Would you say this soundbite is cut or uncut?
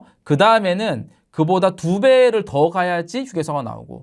uncut